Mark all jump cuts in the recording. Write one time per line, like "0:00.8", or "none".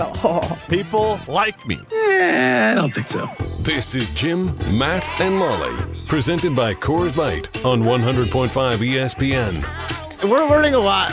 0:10.2